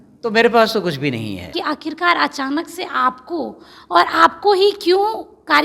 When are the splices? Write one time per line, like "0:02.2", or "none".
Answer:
0:01.5

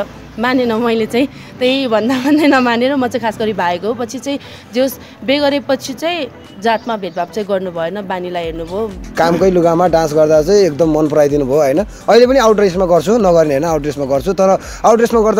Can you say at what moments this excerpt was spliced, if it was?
0:09.0

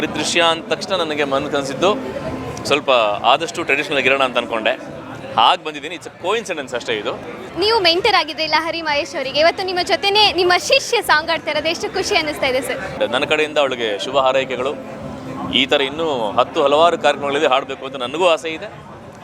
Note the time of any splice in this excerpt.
0:07.4
0:12.9

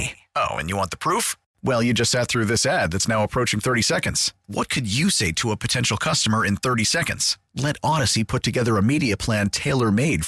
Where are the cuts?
none

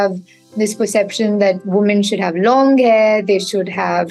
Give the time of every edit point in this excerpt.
none

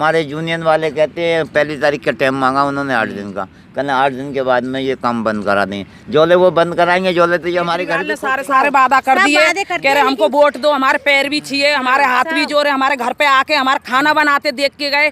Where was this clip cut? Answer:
0:08.1

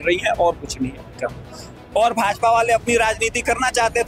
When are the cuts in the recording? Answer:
none

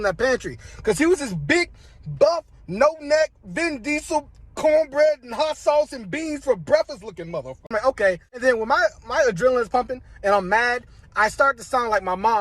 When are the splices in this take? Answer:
0:07.7

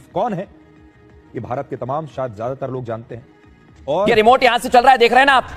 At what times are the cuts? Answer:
0:04.1

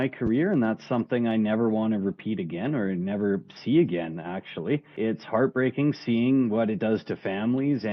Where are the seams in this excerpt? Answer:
0:04.9

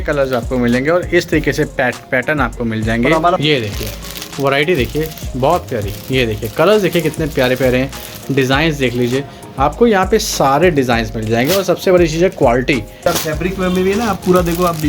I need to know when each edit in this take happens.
0:03.4
0:13.0

